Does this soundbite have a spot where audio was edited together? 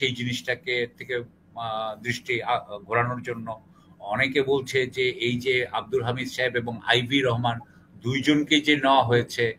no; 0 cuts

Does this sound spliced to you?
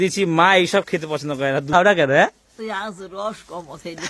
yes; 1 cut; at 1.7 s

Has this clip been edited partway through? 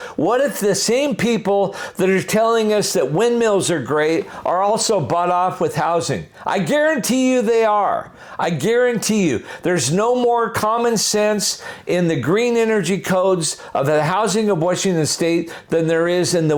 no; 0 cuts

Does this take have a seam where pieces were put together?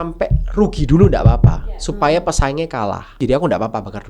yes; 1 cut; at 3.2 s

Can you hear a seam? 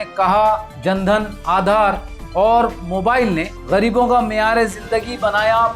no; 0 cuts

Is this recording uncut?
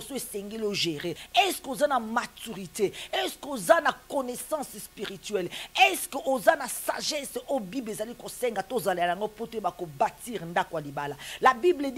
no; 1 cut; at 1.2 s

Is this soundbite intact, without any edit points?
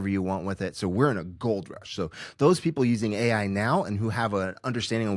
yes; 0 cuts

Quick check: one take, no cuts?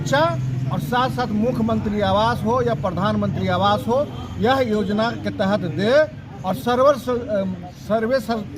yes; 0 cuts

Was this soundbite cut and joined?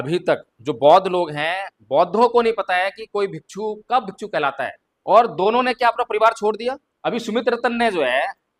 yes; 2 cuts; at 4.9 s, 6.9 s

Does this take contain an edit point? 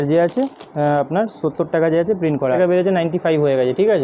yes; 1 cut; at 2.6 s

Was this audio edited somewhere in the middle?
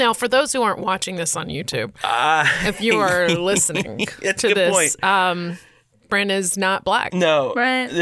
no; 0 cuts

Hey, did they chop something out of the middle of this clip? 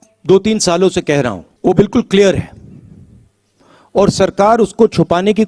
yes; 1 cut; at 1.4 s

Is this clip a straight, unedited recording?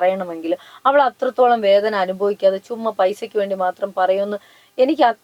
yes; 0 cuts

